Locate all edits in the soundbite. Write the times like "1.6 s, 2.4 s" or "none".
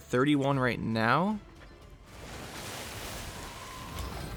none